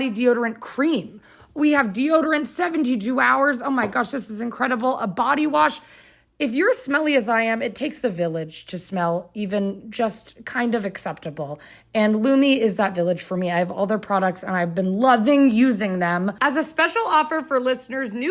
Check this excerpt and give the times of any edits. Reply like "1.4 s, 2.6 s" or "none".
16.3 s